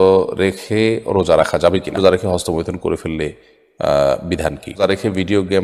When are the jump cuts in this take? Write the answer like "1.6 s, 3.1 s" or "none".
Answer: 2.0 s, 4.8 s